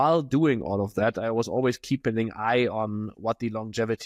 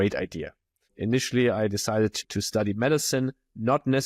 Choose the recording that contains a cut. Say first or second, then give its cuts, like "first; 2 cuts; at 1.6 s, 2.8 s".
second; 2 cuts; at 0.9 s, 2.2 s